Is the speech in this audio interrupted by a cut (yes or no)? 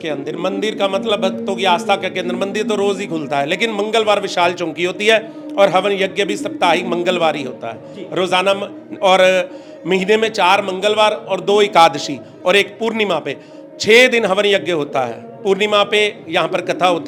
no